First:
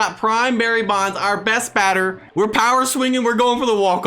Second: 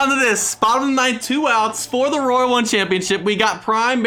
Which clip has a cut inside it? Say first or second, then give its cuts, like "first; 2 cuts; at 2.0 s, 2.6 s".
first; 1 cut; at 2.2 s